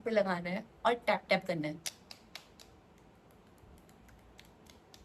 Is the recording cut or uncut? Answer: uncut